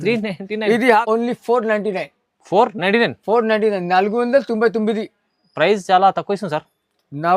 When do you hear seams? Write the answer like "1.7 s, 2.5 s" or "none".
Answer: 1.0 s